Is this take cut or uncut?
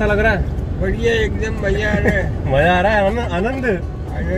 uncut